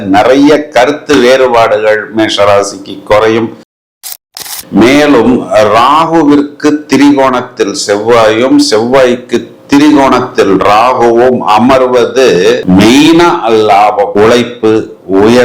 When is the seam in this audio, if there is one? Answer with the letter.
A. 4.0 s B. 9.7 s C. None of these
A